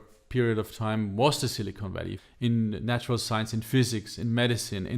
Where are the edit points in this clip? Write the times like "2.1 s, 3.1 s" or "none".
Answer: 2.2 s